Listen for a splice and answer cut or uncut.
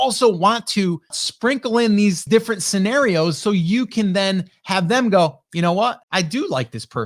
cut